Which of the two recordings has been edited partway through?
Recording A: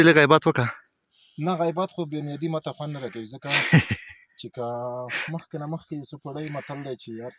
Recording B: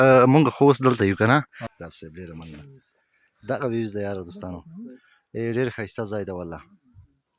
B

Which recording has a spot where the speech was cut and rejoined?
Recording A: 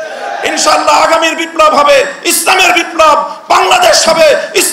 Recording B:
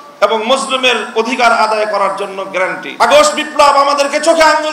B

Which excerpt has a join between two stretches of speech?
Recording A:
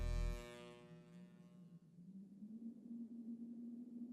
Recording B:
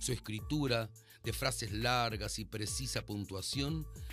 A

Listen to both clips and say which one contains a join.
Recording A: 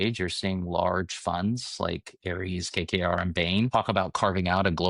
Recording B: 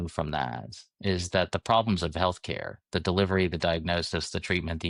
A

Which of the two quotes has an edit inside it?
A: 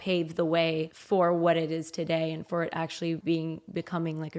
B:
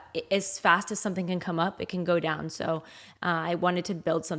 A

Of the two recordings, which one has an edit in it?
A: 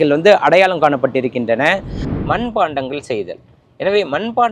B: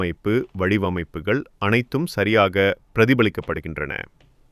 A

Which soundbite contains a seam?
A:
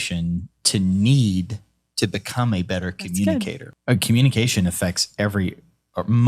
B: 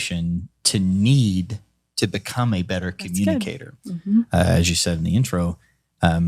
A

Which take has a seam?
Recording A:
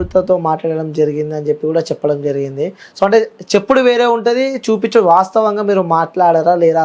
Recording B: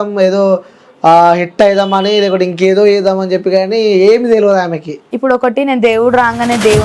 B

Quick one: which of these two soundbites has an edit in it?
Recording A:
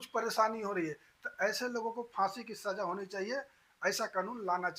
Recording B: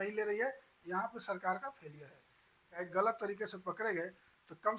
B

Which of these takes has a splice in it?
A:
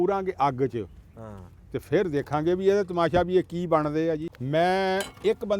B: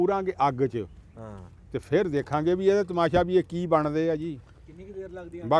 A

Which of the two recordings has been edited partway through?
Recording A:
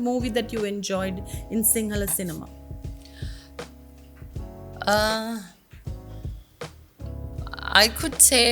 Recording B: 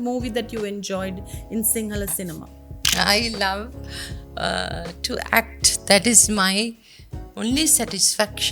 B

